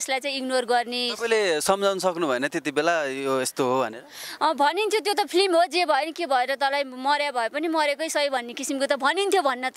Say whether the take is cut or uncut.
uncut